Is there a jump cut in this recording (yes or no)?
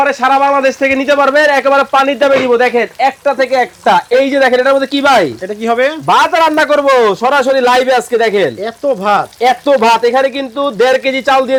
no